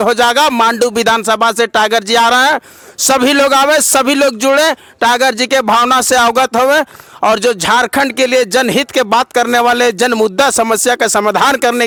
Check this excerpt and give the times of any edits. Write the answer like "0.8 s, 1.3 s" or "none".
none